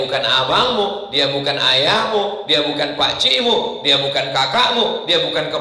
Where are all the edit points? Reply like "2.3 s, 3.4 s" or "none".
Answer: none